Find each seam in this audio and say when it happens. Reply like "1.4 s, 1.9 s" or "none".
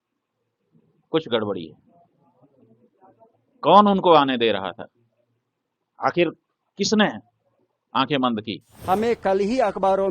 8.7 s